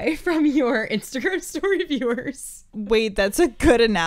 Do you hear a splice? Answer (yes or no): no